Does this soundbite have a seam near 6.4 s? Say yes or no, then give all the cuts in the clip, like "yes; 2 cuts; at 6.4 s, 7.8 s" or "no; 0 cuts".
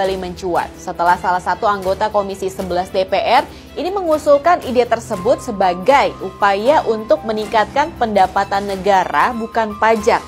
no; 0 cuts